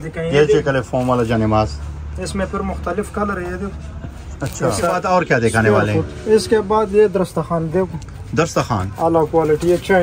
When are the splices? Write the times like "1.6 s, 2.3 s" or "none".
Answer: 4.9 s

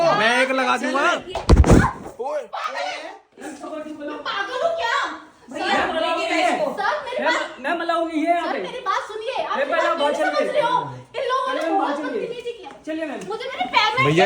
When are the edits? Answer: 3.3 s

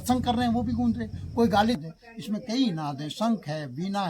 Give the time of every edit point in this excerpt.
1.8 s

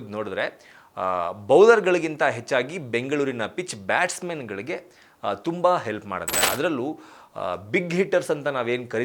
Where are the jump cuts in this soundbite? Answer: none

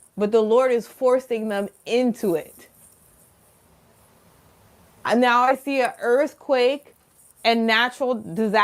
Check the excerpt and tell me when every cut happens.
3.4 s

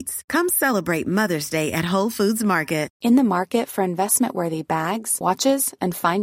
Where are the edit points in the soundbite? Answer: 2.9 s

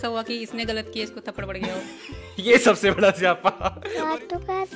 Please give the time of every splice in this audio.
3.7 s

